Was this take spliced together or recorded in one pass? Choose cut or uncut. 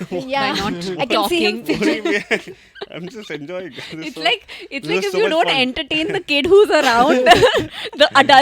uncut